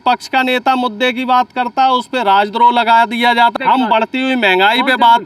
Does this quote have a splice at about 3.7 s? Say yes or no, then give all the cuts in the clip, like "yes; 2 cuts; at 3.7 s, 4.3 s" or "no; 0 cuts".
yes; 1 cut; at 3.7 s